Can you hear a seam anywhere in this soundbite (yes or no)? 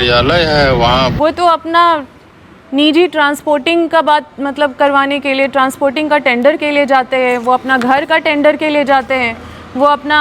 yes